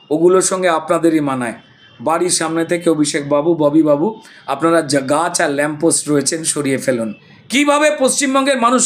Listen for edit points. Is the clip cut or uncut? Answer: cut